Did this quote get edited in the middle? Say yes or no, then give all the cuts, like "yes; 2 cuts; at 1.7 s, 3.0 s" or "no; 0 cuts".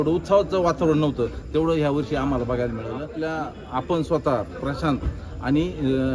yes; 1 cut; at 3.1 s